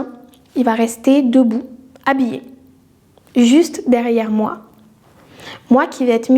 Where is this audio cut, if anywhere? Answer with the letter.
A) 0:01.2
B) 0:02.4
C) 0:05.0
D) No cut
D